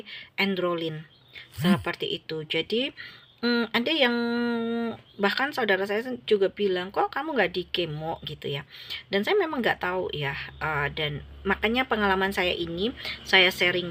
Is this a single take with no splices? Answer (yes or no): yes